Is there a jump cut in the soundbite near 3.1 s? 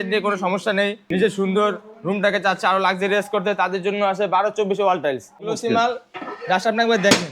no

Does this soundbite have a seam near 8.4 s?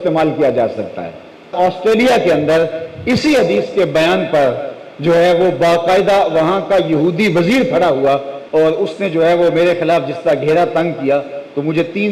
yes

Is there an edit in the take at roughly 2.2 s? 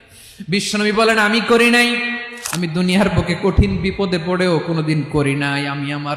yes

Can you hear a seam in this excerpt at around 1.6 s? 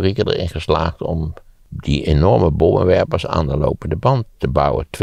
yes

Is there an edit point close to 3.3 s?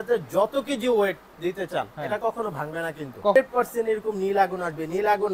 yes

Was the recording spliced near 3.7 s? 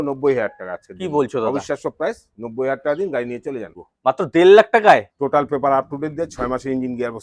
yes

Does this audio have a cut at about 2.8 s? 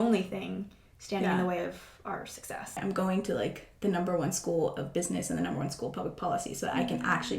yes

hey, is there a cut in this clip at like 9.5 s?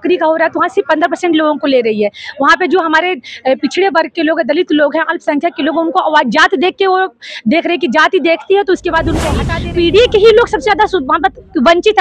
yes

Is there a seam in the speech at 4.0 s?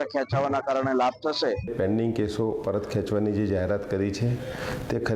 no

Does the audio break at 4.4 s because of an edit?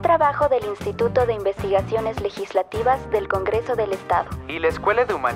no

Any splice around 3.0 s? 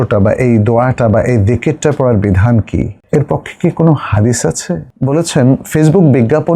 yes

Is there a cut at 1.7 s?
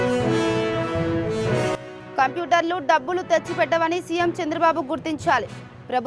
yes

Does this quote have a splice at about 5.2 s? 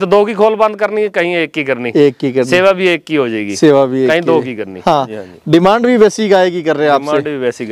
yes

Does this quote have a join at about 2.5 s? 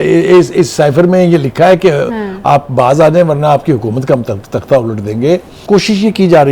no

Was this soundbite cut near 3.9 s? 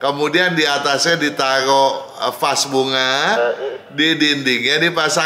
no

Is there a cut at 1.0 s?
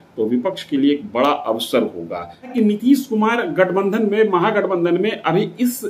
no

